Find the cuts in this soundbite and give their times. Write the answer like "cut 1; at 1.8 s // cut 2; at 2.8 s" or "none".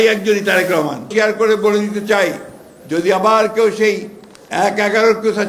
cut 1; at 1.1 s

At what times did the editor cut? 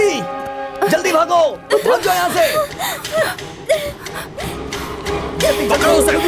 cut 1; at 4.6 s

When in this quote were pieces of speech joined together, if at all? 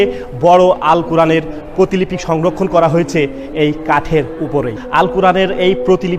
cut 1; at 4.8 s

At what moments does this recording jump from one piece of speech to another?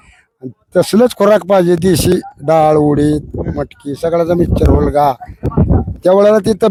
none

